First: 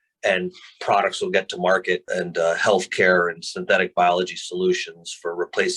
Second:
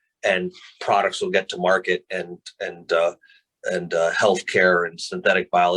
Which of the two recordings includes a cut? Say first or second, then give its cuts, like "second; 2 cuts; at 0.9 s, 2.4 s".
first; 1 cut; at 2.0 s